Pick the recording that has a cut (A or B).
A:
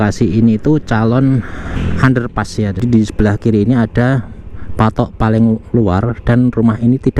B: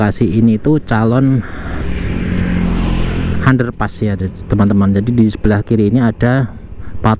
A